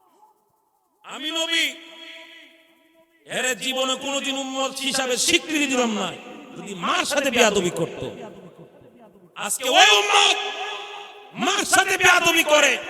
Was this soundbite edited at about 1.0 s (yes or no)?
yes